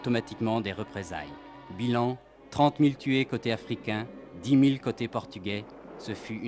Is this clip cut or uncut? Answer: uncut